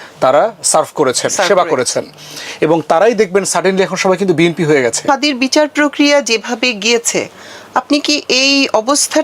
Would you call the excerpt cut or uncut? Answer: cut